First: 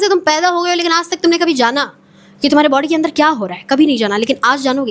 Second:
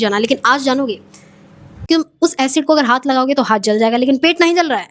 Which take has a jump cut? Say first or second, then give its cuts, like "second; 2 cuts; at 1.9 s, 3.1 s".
second; 1 cut; at 1.9 s